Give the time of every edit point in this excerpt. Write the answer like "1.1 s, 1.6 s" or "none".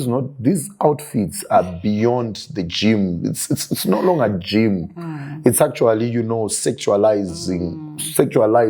none